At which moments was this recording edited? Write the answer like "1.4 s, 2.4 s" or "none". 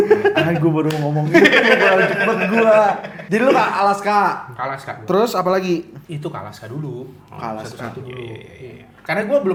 none